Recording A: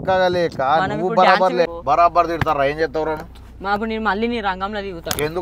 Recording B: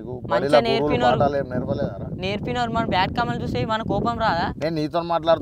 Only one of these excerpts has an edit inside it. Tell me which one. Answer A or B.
A